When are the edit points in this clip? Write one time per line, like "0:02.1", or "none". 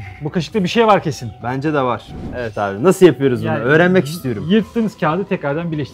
0:02.4

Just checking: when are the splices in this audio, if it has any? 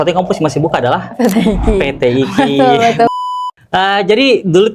0:03.1

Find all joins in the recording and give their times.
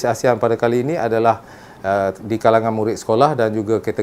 none

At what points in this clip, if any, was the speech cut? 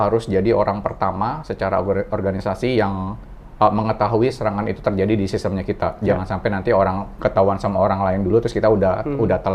none

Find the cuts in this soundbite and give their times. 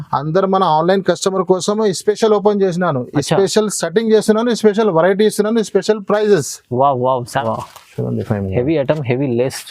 0:07.4

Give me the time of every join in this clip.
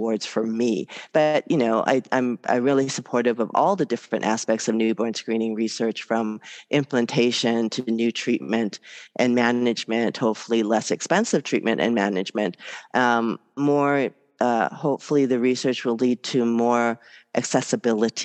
none

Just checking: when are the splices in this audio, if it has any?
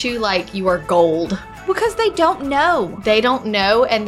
0:01.5

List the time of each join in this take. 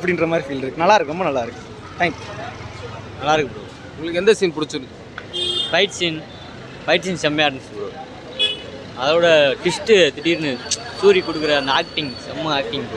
none

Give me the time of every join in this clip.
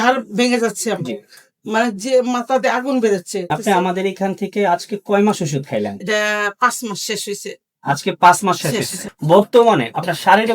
0:03.4
0:09.0

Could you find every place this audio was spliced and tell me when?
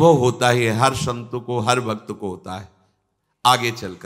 none

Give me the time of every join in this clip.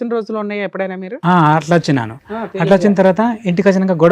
none

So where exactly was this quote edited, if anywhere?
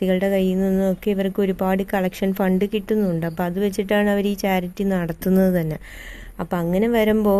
none

